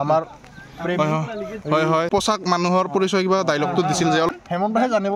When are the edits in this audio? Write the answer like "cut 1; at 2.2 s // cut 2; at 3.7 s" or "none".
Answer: cut 1; at 2.1 s // cut 2; at 4.3 s